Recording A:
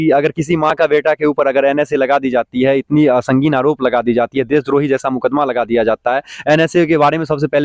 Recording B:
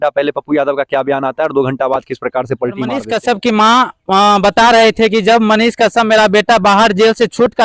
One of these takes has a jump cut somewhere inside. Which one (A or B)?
B